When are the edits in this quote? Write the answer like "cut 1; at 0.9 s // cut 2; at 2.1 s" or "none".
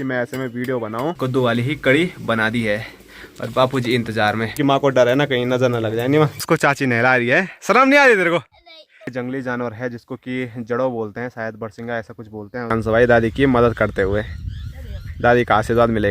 cut 1; at 1.2 s // cut 2; at 4.6 s // cut 3; at 6.4 s // cut 4; at 9.1 s // cut 5; at 12.7 s